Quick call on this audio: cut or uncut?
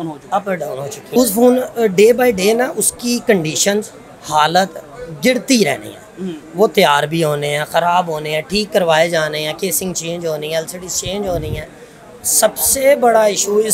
cut